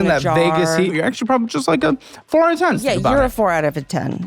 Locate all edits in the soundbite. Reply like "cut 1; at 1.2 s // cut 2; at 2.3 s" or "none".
cut 1; at 0.9 s // cut 2; at 2.8 s